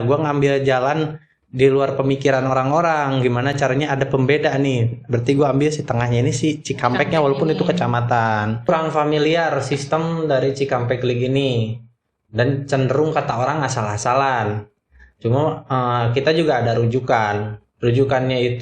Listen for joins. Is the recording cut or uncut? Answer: cut